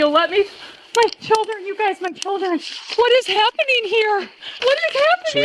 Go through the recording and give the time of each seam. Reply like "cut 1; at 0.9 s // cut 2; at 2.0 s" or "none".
cut 1; at 4.4 s